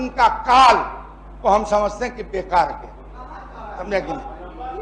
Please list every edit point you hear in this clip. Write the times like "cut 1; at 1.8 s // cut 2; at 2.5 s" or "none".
none